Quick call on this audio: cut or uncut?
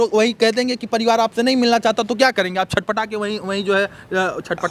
uncut